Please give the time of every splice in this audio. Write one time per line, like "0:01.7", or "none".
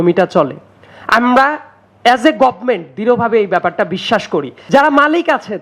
0:04.6